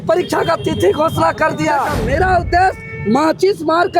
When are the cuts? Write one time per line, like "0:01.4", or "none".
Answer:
0:02.0

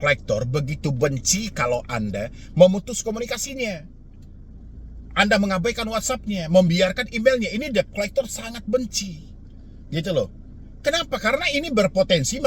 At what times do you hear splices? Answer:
none

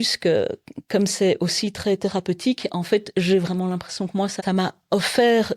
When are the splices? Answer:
0:04.4

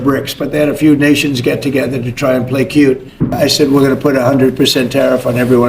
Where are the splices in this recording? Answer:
0:03.3

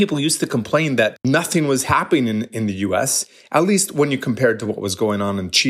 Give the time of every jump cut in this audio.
0:01.2

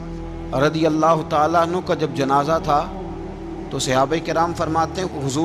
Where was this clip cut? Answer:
none

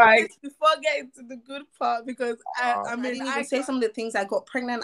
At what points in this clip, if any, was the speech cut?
0:03.4

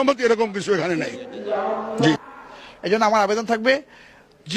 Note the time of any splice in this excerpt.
0:02.2

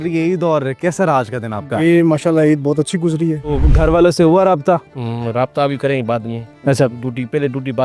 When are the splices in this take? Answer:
0:03.6

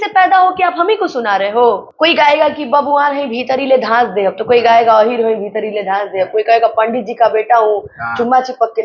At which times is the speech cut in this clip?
0:01.9

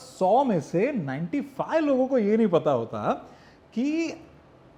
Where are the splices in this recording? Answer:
none

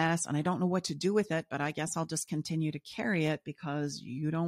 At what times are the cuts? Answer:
none

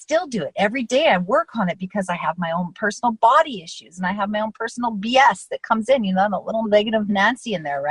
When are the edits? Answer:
0:06.7

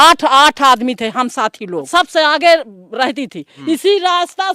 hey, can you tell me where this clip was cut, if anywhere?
0:01.9
0:03.5

